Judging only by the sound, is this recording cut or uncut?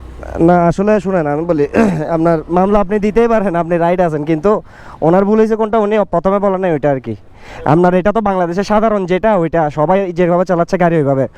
uncut